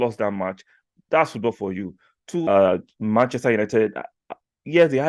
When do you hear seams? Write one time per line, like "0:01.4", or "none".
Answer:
0:02.4